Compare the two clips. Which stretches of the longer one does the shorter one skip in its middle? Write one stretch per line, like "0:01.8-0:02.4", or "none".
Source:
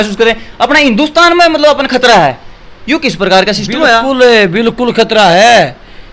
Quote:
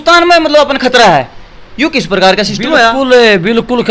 none